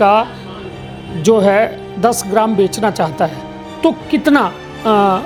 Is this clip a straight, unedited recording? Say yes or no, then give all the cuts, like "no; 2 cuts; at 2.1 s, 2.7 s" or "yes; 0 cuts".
yes; 0 cuts